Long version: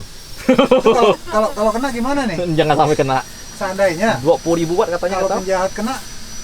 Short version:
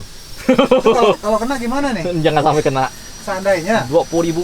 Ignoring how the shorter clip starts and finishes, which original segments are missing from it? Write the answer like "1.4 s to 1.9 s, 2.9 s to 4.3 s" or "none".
1.2 s to 1.5 s